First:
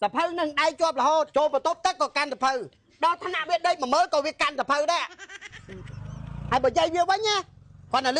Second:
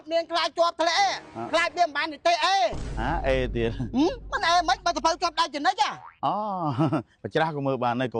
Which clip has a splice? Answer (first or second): first